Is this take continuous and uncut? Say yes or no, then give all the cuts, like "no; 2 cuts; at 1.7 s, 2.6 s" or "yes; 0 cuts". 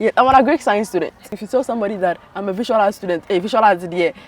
no; 1 cut; at 1.4 s